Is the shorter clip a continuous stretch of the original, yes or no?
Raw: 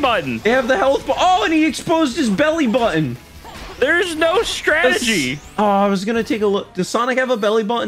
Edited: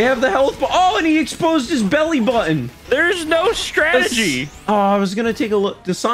no